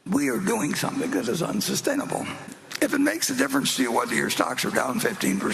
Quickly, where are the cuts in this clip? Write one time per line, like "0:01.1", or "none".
0:02.7